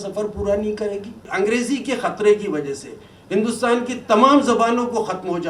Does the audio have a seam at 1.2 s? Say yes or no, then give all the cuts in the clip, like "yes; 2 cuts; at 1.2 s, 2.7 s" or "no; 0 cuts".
yes; 1 cut; at 1.2 s